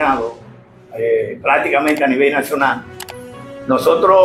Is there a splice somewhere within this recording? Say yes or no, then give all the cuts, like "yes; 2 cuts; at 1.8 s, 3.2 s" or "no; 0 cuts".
no; 0 cuts